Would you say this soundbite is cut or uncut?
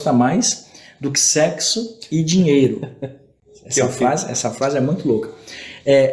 uncut